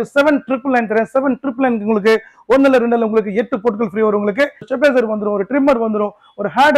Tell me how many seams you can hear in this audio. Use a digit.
1